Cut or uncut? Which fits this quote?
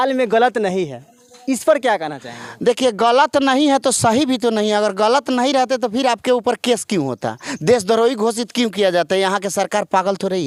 uncut